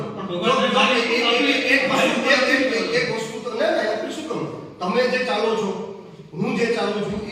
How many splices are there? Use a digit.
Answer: 1